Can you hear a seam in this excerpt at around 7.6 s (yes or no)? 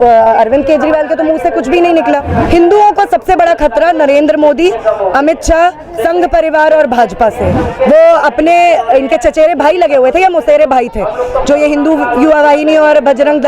yes